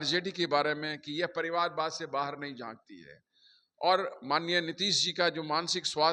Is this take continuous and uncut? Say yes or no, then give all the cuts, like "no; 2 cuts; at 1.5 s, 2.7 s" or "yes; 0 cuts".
yes; 0 cuts